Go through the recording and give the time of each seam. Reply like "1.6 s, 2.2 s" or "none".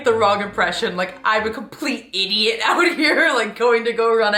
none

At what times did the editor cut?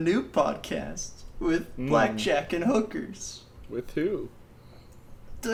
none

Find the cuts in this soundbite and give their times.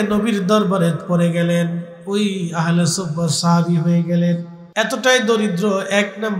4.6 s

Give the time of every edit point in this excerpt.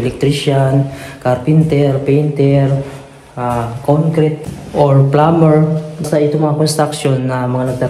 none

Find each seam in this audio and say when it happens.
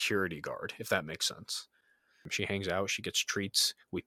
2.2 s

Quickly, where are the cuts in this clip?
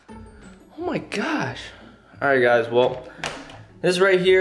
none

